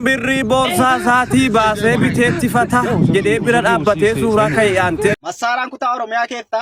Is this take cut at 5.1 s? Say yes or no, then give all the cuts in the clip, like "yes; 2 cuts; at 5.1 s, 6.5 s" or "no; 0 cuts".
yes; 1 cut; at 5.1 s